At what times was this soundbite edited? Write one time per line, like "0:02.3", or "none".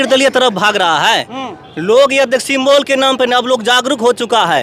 none